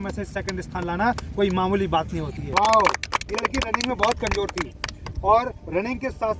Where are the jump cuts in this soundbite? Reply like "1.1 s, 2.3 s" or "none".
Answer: 2.4 s